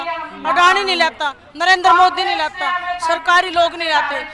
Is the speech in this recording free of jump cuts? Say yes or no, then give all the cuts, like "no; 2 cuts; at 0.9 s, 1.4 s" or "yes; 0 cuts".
yes; 0 cuts